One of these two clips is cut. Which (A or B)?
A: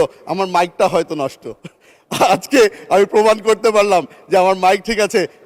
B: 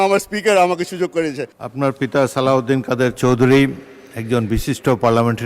B